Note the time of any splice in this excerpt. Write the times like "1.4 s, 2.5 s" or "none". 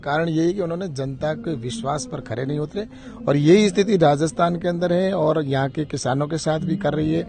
none